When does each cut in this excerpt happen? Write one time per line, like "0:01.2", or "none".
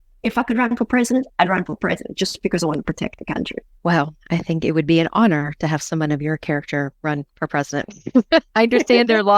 0:03.6
0:07.0